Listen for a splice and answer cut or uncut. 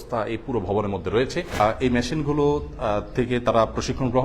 cut